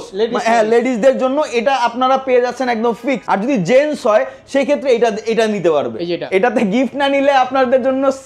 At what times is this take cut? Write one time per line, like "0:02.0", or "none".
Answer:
0:03.2
0:06.2